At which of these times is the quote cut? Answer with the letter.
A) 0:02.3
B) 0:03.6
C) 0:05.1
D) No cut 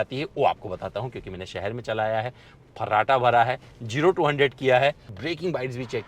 C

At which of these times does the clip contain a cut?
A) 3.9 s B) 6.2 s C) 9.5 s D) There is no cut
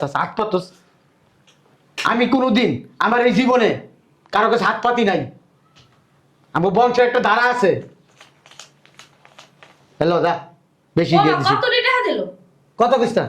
D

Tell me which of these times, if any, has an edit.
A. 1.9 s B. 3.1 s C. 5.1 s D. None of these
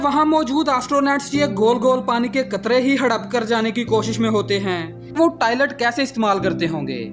C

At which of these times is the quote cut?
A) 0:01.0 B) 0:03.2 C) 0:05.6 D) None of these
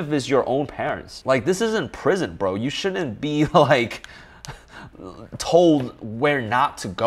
D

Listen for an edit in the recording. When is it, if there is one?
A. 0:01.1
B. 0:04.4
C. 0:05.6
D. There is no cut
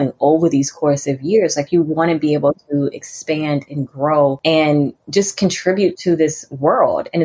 B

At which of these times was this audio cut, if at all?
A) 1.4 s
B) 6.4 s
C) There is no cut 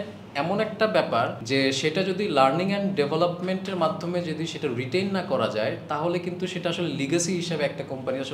A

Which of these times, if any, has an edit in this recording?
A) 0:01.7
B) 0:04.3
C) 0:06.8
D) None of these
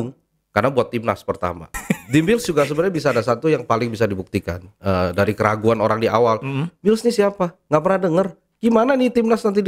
A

